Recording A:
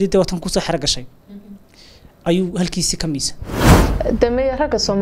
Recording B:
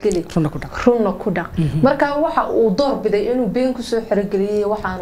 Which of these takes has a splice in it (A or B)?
A